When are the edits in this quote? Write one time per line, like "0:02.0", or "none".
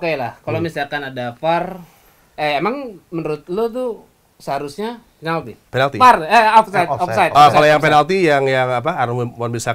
0:05.6